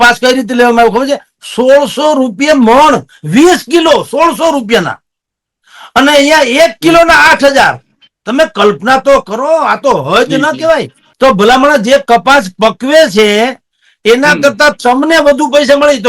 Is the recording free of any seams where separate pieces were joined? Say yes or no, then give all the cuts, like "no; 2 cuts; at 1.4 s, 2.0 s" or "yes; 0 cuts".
no; 1 cut; at 11.0 s